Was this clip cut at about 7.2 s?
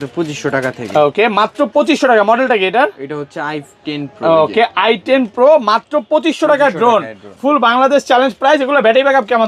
no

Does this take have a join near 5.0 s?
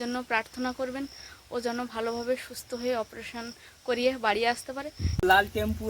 yes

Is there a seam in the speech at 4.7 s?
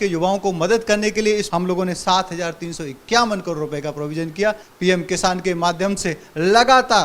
yes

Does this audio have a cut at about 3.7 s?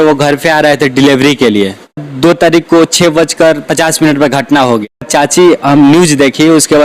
no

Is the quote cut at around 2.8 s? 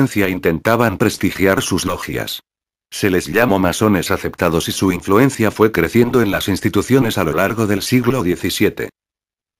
no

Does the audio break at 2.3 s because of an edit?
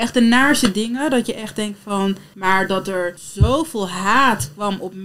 yes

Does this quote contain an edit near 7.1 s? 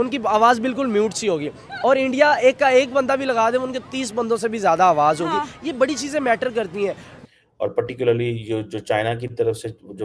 yes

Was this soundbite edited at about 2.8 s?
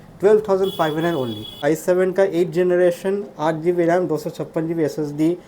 no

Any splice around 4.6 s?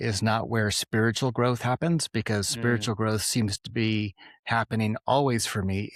no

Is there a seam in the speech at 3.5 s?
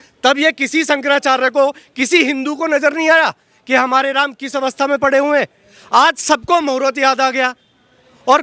no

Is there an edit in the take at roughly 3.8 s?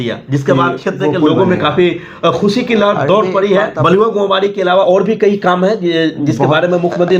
no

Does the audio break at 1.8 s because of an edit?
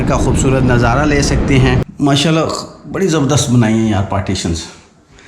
yes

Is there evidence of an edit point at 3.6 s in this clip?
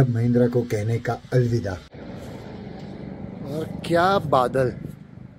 no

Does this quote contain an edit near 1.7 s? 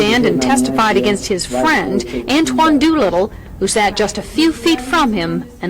no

